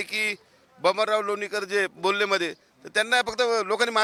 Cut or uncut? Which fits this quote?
uncut